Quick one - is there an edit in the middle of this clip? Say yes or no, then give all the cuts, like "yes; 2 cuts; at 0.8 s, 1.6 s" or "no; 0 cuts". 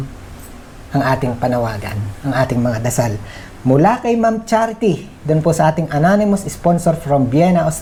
no; 0 cuts